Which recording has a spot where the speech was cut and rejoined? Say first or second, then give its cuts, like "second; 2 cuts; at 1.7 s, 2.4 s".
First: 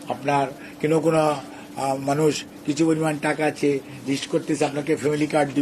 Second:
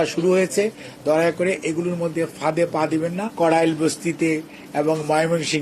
second; 1 cut; at 3.2 s